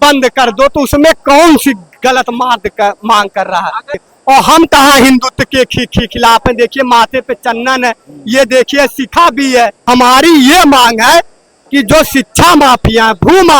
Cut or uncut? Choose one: cut